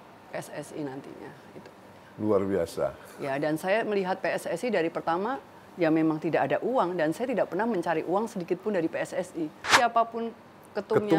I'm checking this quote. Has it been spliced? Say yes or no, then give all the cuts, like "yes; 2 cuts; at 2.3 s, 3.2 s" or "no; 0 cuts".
yes; 1 cut; at 9.7 s